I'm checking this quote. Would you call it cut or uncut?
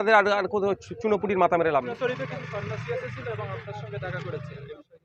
cut